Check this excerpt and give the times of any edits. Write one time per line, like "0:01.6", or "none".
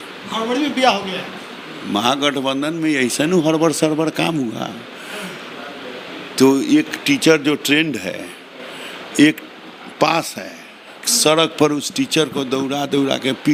none